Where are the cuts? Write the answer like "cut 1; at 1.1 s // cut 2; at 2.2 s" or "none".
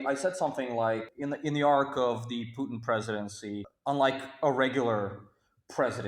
cut 1; at 1.1 s // cut 2; at 3.7 s